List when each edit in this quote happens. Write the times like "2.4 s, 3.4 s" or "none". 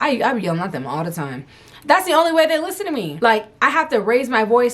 none